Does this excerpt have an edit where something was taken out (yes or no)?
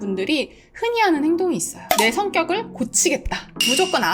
no